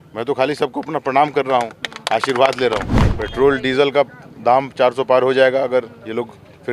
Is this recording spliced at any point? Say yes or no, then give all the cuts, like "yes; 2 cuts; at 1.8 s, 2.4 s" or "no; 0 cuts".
yes; 1 cut; at 3.0 s